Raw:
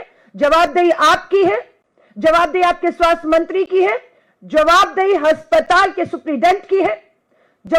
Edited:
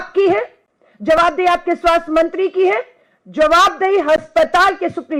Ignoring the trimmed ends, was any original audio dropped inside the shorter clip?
no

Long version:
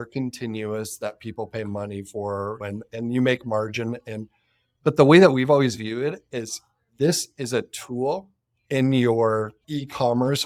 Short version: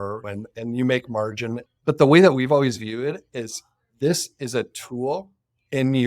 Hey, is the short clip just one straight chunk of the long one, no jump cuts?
no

